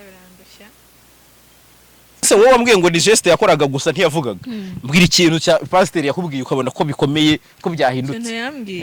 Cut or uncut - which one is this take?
cut